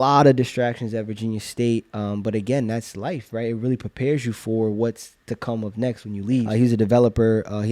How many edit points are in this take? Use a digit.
1